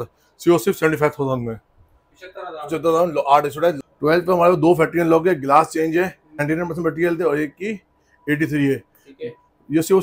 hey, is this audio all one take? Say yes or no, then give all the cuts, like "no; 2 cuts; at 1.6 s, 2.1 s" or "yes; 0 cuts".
no; 2 cuts; at 3.9 s, 6.4 s